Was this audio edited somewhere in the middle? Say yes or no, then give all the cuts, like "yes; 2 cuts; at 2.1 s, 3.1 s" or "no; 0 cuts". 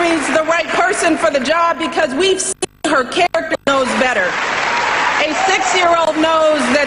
no; 0 cuts